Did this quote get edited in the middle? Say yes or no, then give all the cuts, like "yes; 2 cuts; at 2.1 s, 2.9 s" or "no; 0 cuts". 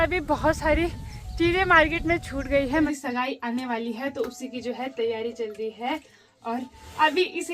yes; 1 cut; at 2.9 s